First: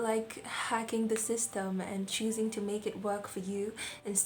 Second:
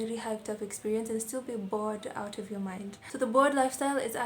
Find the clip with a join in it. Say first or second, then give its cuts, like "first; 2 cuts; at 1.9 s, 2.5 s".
second; 1 cut; at 2.9 s